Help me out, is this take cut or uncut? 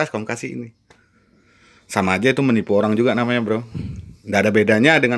uncut